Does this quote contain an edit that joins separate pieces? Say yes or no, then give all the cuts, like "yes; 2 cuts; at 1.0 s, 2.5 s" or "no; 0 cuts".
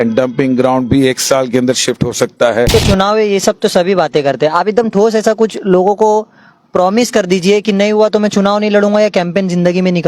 yes; 1 cut; at 2.7 s